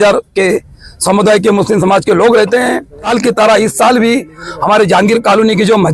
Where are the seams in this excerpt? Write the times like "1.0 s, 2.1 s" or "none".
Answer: 3.1 s